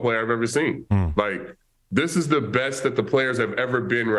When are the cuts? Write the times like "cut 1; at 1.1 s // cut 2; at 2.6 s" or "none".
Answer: none